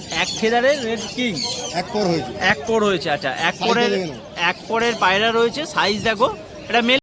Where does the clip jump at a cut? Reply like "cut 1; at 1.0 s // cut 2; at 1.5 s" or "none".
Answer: none